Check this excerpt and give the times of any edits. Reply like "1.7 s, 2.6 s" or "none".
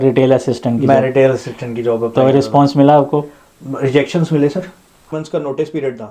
5.0 s